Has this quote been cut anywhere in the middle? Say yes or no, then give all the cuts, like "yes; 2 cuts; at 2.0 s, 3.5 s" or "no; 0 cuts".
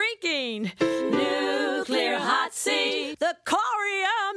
no; 0 cuts